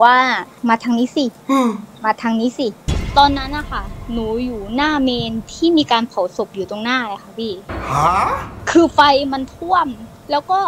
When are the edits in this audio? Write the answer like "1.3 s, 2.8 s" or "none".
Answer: 3.0 s